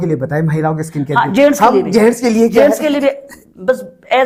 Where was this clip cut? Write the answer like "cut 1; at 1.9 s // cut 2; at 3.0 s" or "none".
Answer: none